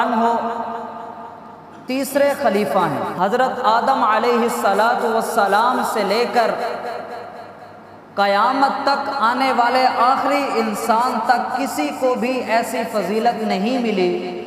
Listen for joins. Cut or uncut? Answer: cut